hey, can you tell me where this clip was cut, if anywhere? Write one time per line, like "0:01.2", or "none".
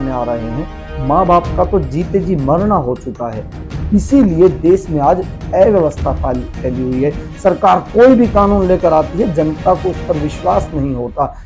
0:03.6